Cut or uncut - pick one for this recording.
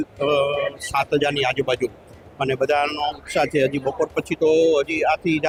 uncut